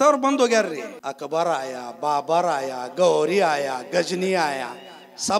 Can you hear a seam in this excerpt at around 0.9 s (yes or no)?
yes